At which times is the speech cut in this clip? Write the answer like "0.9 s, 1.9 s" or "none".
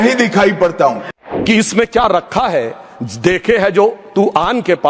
1.1 s